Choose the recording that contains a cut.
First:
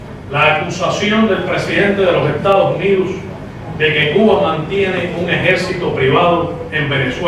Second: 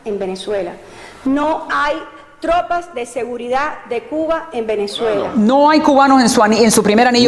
second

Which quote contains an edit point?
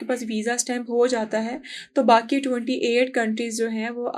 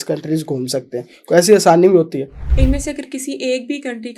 second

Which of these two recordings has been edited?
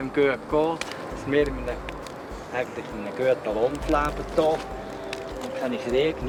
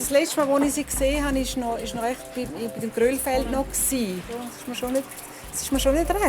second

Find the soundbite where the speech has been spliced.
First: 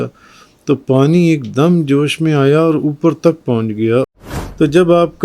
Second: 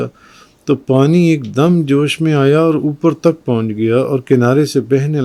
first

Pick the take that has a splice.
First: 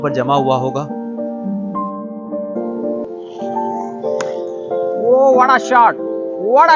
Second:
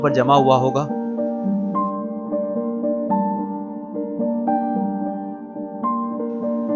first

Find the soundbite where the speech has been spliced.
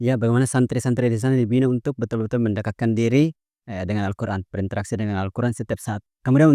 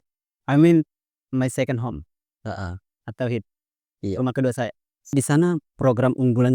second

